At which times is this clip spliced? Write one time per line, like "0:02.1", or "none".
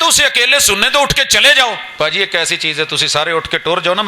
0:01.9